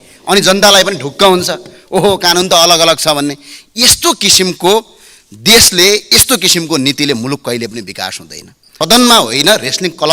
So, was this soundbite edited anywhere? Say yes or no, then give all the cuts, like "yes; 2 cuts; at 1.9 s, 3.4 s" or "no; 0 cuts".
yes; 1 cut; at 8.7 s